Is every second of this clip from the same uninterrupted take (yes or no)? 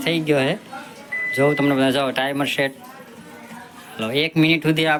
yes